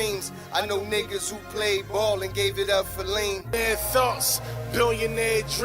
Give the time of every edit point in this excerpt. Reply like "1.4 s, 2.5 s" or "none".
3.5 s